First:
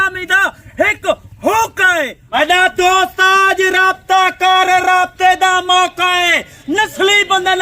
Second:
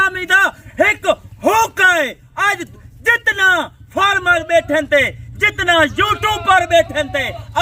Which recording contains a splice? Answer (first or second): first